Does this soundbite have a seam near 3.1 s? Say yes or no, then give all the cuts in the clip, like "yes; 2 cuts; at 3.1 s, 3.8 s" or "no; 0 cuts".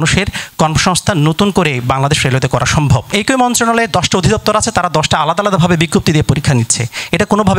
yes; 1 cut; at 3.1 s